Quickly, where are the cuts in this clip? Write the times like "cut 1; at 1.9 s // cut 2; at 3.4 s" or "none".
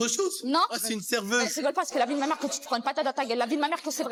none